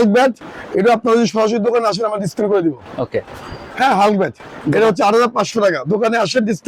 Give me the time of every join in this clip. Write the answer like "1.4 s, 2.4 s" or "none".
none